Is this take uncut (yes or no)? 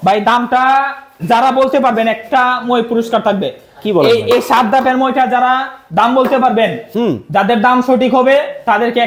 yes